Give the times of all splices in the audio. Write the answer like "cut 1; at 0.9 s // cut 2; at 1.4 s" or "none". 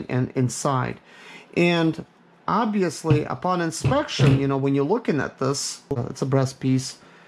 cut 1; at 5.6 s